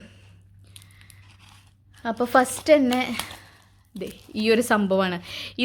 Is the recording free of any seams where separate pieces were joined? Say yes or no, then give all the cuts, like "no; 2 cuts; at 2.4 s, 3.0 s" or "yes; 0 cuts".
yes; 0 cuts